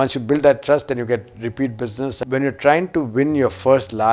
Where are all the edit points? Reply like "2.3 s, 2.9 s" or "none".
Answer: 2.2 s